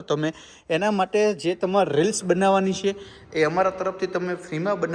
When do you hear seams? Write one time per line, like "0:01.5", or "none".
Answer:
none